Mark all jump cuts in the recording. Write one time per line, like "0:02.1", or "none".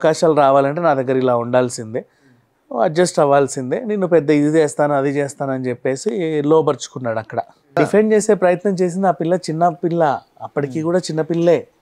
0:07.8